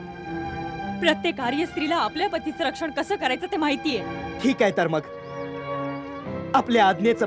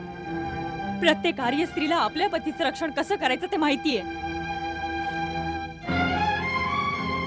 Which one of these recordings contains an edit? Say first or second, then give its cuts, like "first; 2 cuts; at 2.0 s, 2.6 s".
first; 1 cut; at 4.2 s